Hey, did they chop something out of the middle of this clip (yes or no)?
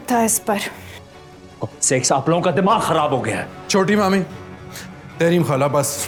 no